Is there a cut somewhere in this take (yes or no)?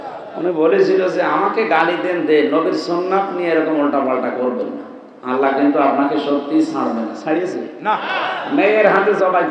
no